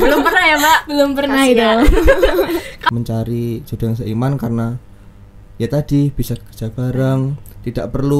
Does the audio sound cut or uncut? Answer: cut